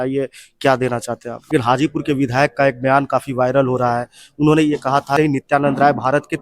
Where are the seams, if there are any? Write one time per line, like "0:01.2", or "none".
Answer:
0:01.5
0:05.2